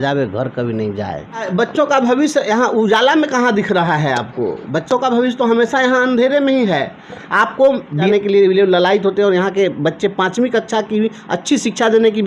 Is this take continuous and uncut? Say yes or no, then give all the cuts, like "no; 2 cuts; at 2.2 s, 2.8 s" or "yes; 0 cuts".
no; 2 cuts; at 1.5 s, 8.1 s